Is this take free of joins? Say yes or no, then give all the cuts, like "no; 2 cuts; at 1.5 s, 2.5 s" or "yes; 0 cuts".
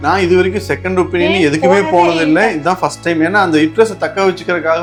yes; 0 cuts